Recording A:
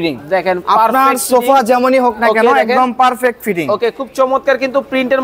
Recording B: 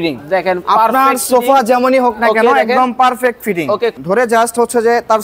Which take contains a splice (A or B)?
B